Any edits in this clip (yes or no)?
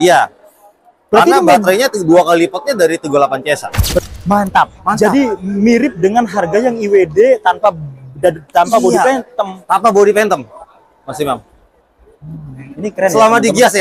yes